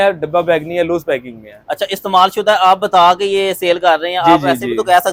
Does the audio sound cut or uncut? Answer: uncut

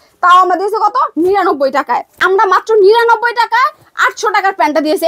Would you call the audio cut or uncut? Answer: cut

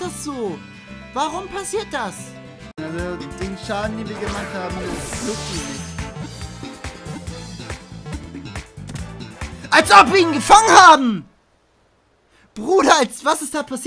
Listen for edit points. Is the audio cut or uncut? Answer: cut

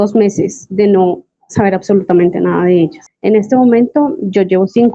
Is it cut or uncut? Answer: cut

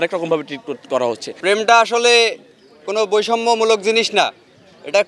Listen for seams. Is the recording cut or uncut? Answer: cut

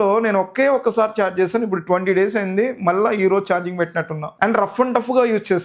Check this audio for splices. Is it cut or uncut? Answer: uncut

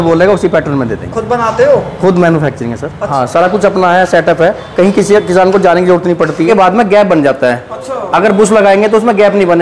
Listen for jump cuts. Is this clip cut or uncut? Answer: cut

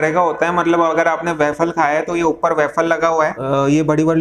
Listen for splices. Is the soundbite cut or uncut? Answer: cut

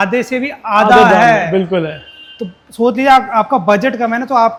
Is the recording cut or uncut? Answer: uncut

